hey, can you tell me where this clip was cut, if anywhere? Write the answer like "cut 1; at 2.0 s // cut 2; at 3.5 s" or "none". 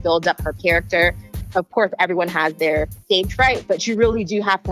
cut 1; at 1.3 s // cut 2; at 2.9 s